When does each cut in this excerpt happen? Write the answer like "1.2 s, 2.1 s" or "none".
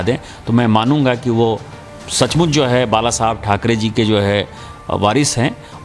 none